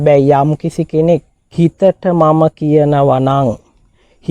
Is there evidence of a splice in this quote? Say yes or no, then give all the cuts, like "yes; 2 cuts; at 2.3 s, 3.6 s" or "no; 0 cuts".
yes; 1 cut; at 1.4 s